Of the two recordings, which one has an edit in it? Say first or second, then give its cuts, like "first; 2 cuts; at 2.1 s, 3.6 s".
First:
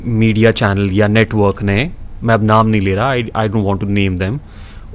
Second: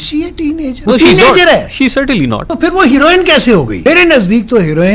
second; 3 cuts; at 0.8 s, 2.4 s, 3.8 s